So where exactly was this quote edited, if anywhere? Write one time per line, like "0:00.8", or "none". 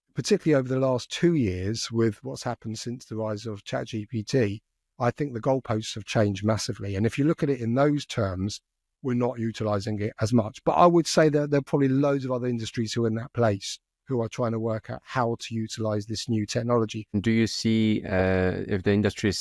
0:17.2